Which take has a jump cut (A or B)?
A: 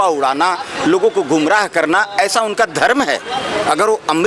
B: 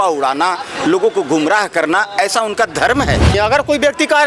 B